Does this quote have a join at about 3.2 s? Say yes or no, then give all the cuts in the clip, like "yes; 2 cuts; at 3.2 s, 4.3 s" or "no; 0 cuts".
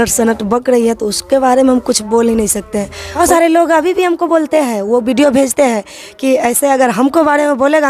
yes; 1 cut; at 3.2 s